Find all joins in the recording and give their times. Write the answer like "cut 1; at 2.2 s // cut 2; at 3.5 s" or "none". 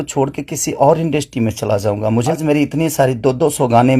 cut 1; at 2.4 s